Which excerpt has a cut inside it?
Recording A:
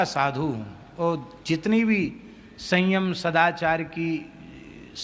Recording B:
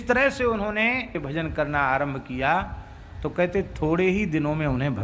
B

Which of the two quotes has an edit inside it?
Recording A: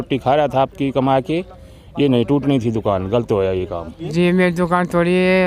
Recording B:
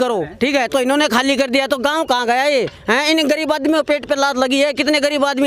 A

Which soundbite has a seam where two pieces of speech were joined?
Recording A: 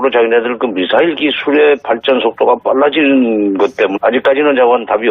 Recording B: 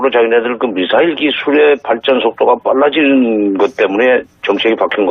B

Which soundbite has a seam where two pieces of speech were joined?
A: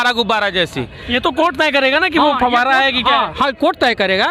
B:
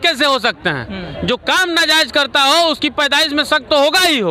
A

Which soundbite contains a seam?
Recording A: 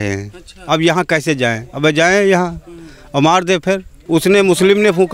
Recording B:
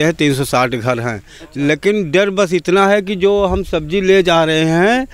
A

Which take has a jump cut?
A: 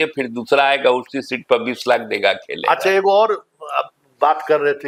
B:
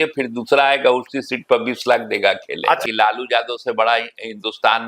B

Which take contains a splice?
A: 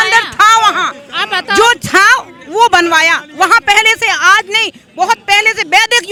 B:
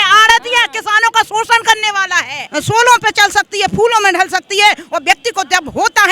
B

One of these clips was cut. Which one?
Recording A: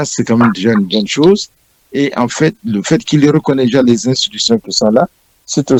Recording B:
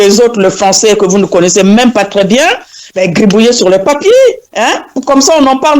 B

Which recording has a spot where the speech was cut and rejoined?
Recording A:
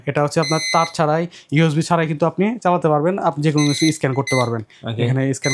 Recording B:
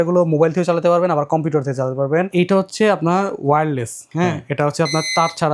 B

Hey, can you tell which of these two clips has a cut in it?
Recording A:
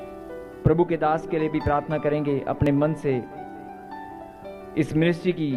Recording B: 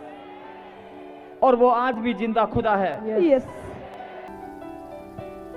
B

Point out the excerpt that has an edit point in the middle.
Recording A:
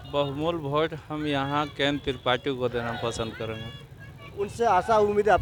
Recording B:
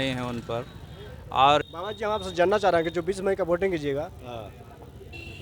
B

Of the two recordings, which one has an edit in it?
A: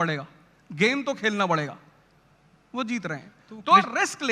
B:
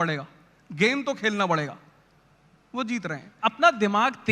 B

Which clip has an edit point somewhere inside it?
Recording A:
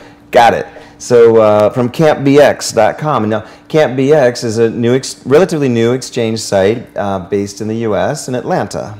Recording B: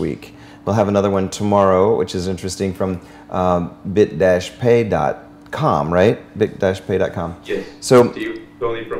A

